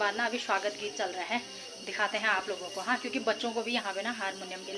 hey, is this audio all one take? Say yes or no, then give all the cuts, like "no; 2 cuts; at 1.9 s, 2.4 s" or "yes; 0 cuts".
yes; 0 cuts